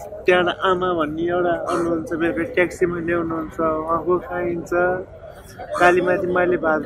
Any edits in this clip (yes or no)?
no